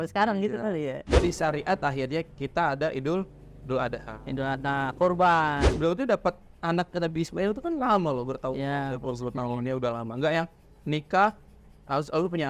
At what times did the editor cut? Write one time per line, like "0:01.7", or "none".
0:01.1
0:05.7